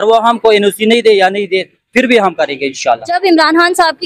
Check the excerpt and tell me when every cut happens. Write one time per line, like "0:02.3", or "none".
0:03.0